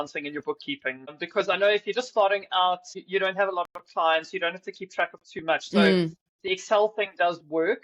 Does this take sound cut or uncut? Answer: cut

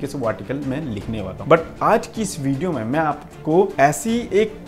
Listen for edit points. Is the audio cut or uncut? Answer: cut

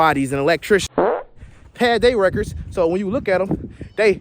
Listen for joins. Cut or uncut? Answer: cut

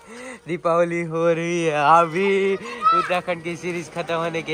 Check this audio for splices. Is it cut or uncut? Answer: uncut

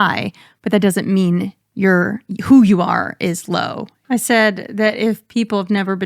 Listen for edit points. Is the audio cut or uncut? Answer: cut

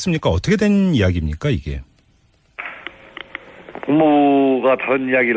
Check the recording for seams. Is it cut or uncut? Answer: uncut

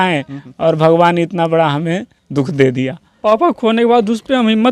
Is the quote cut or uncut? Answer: cut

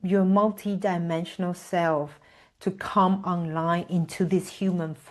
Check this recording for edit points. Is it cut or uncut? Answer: uncut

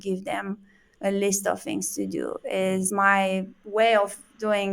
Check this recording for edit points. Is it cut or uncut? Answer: cut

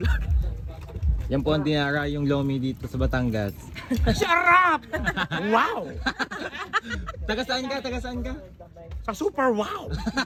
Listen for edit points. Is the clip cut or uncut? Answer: uncut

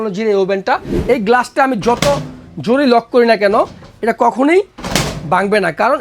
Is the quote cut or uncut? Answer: cut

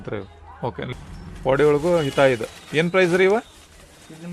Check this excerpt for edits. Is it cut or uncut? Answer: cut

